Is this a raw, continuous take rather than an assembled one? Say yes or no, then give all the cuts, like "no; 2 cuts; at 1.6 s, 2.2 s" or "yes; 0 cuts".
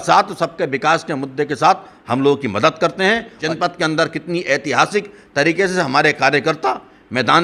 no; 1 cut; at 3.5 s